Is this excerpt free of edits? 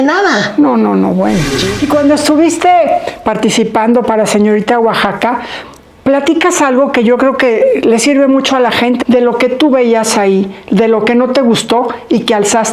no; 2 cuts; at 1.6 s, 9.0 s

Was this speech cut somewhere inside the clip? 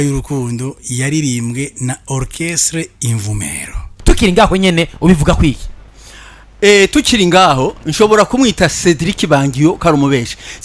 no; 0 cuts

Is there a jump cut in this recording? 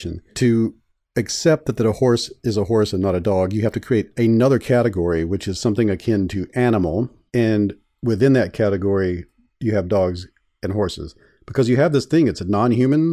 no; 0 cuts

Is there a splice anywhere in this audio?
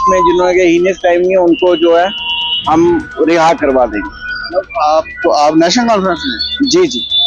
no; 0 cuts

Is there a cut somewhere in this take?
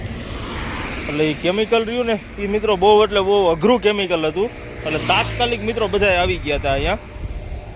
no; 0 cuts

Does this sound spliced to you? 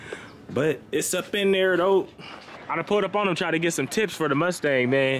yes; 1 cut; at 2.6 s

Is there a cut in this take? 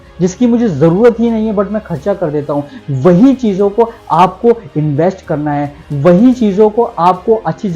no; 0 cuts

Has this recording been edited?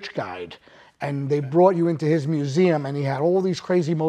no; 0 cuts

